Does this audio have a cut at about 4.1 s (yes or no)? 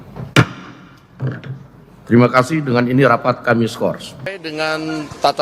yes